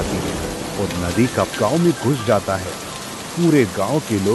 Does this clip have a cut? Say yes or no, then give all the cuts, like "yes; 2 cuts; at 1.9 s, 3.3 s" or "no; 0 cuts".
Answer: no; 0 cuts